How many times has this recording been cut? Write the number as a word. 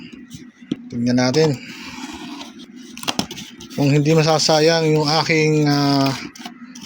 two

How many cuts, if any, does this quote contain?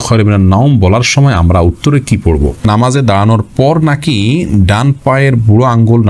one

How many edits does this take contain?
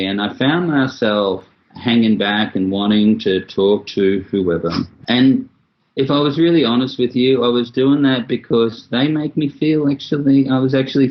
one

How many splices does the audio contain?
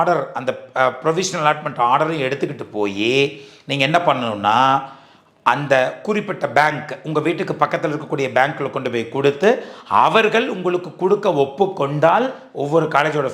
one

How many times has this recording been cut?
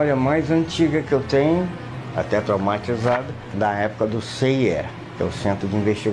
two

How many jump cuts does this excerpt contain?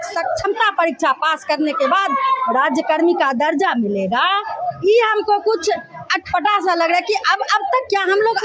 zero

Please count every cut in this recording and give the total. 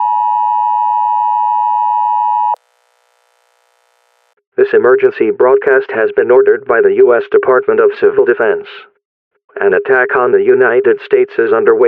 one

